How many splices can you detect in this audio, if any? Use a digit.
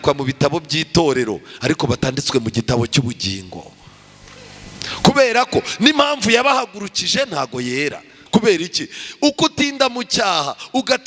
1